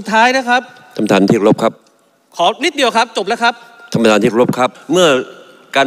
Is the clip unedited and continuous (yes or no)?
no